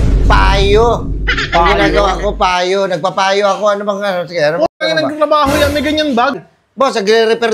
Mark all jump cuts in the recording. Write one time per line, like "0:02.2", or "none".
0:06.4